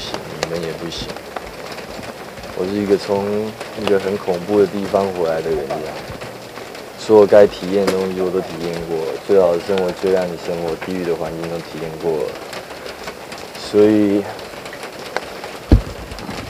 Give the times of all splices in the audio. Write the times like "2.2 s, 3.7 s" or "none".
none